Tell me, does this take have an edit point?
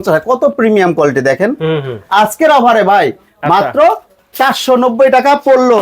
yes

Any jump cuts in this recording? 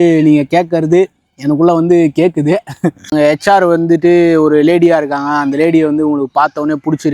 yes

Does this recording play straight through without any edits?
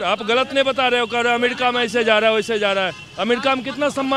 yes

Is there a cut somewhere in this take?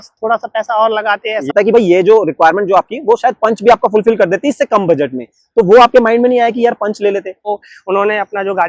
yes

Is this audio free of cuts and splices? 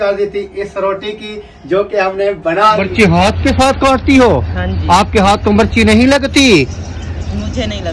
no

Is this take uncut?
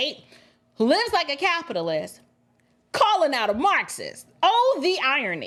yes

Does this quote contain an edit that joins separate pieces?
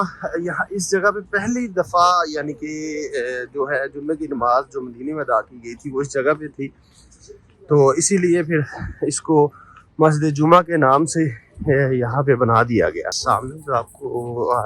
yes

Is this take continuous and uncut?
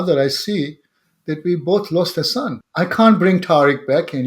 no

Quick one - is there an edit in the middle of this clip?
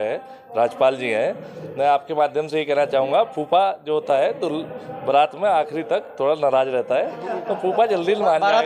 no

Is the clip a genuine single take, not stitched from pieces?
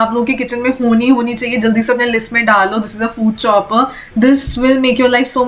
yes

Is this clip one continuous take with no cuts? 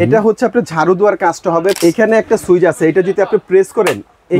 no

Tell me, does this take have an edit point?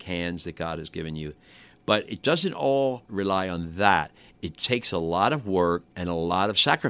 yes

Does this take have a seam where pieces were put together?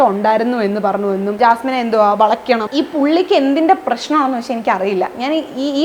yes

